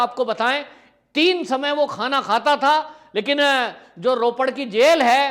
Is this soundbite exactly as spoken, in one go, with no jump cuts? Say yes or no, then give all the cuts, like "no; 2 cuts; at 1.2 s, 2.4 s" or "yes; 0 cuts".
yes; 0 cuts